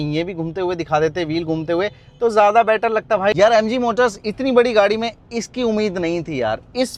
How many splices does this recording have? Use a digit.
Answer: 0